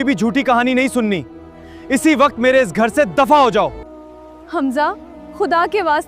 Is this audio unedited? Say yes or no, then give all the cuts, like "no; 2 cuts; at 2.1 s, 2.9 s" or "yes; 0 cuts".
no; 1 cut; at 4.4 s